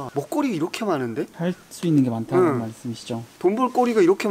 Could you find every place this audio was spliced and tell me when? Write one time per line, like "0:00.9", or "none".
none